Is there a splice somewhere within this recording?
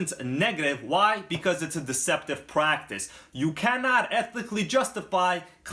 no; 0 cuts

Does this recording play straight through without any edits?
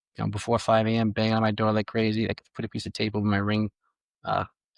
yes; 0 cuts

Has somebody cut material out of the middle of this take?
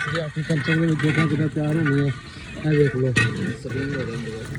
no; 0 cuts

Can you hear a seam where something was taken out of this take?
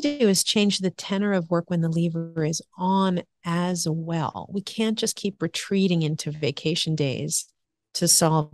no; 0 cuts

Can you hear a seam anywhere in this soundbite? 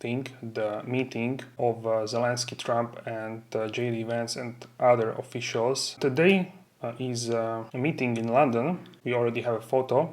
yes; 4 cuts; at 1.5 s, 6.0 s, 7.7 s, 8.9 s

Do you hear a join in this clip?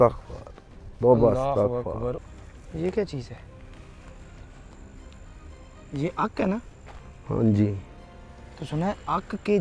yes; 1 cut; at 2.1 s

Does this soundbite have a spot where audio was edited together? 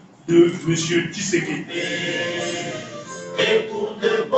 yes; 1 cut; at 1.8 s

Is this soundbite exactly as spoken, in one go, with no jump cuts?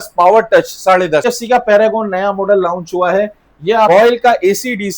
no; 2 cuts; at 1.2 s, 3.9 s

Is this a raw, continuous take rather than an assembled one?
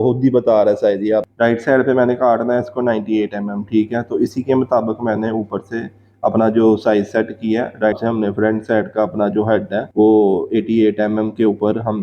no; 2 cuts; at 1.3 s, 8.0 s

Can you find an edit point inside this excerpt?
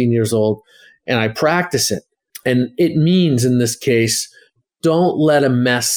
yes; 1 cut; at 4.5 s

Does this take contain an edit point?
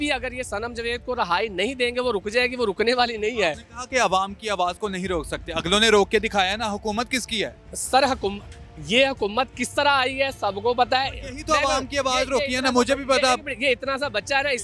no; 0 cuts

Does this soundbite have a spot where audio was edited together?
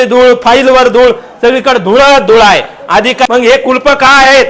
yes; 1 cut; at 3.3 s

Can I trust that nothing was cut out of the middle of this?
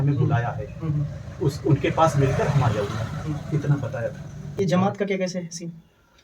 no; 1 cut; at 4.4 s

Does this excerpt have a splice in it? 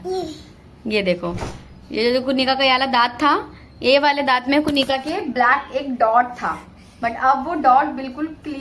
no; 0 cuts

